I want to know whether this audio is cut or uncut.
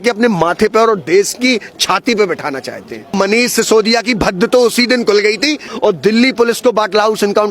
cut